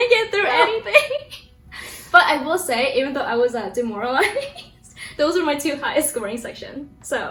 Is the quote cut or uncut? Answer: uncut